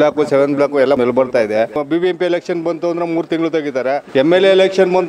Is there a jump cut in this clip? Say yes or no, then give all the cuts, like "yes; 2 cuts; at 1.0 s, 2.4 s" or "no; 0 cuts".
yes; 3 cuts; at 1.0 s, 1.7 s, 4.0 s